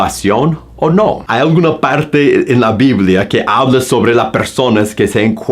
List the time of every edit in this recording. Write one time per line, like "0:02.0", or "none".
0:01.2